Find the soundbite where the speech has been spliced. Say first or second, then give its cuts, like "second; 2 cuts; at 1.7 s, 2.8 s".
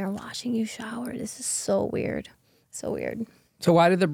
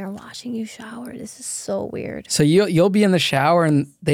second; 1 cut; at 2.2 s